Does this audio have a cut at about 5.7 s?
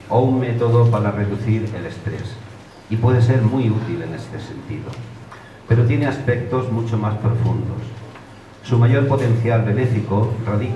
yes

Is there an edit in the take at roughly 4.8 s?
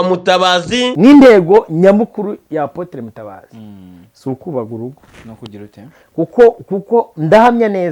no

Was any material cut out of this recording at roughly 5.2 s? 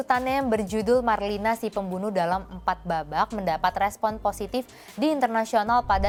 no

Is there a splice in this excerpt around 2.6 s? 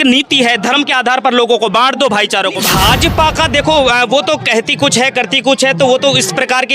yes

